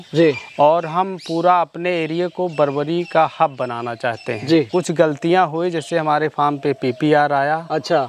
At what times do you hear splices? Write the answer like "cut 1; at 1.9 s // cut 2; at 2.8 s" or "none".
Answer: cut 1; at 4.7 s